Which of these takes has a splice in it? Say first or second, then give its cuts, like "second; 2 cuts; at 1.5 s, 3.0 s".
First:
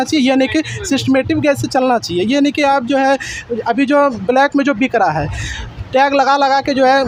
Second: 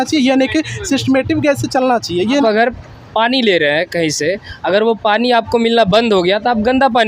second; 1 cut; at 2.4 s